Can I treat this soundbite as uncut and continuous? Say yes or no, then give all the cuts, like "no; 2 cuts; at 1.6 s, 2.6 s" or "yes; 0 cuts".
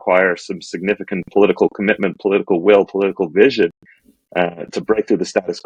yes; 0 cuts